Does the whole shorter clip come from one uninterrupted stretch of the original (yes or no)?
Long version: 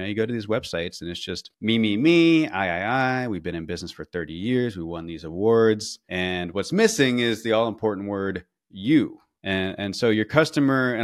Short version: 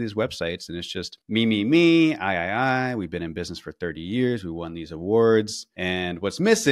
yes